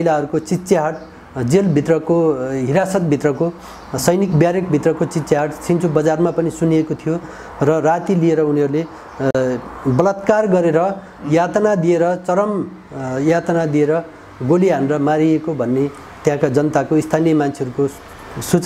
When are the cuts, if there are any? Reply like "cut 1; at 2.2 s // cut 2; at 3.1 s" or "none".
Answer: none